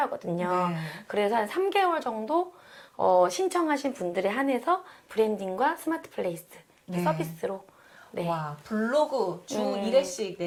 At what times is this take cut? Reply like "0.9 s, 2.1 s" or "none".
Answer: none